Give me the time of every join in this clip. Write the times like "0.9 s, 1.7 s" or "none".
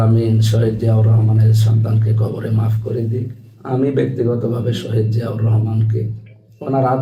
none